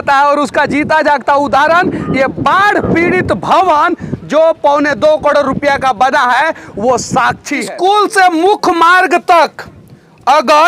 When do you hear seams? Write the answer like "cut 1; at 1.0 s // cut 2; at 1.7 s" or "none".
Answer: cut 1; at 7.7 s